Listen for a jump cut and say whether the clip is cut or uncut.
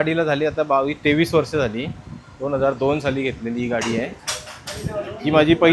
uncut